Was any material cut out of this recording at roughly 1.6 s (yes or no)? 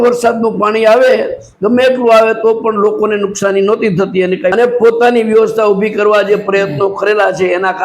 no